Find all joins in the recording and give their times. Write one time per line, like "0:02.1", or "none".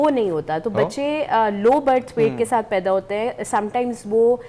none